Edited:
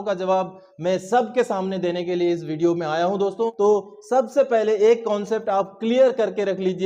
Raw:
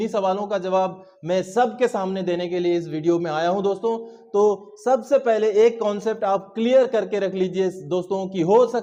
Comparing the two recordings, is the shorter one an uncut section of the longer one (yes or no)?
no